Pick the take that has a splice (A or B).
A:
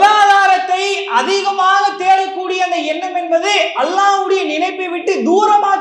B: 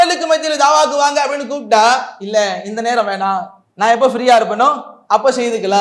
B